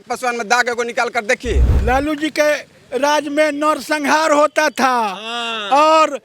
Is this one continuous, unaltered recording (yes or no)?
no